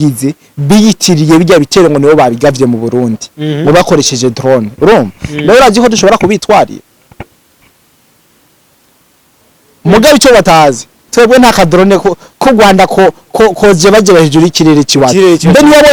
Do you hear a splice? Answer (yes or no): no